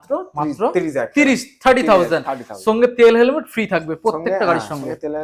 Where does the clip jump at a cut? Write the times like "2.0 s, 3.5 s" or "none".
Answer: none